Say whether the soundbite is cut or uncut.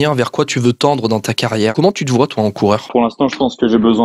cut